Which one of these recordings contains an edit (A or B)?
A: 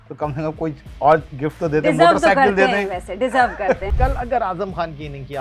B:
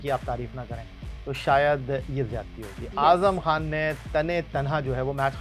A